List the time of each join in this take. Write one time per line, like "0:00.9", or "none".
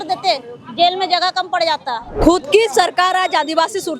0:02.1